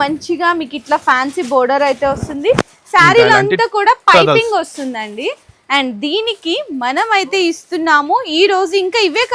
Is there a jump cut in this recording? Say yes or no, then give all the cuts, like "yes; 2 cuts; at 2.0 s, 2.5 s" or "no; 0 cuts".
no; 0 cuts